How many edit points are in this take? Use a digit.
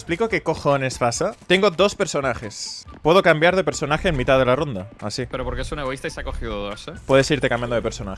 2